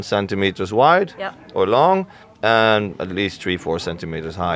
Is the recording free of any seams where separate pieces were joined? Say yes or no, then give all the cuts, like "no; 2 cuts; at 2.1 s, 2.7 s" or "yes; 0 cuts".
yes; 0 cuts